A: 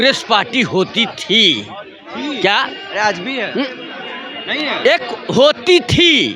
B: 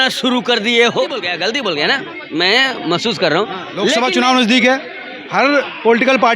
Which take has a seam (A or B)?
B